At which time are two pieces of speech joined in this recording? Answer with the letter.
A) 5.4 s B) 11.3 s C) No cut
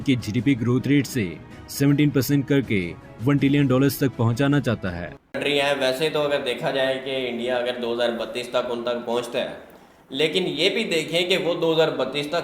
A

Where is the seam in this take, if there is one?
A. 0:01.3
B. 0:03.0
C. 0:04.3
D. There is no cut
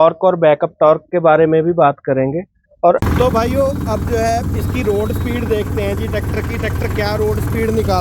B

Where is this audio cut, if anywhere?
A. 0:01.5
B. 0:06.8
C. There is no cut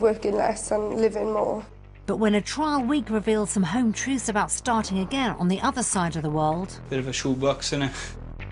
A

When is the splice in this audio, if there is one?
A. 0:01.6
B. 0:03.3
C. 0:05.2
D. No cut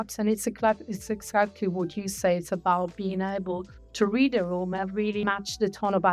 C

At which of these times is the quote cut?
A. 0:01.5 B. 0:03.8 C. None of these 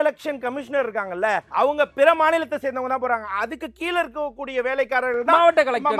A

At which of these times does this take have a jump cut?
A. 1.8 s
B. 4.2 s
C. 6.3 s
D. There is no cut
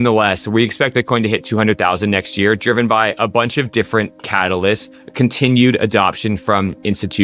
D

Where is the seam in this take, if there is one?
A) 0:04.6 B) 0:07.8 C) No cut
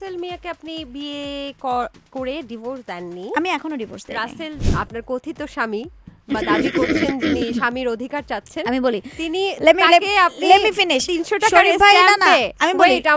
A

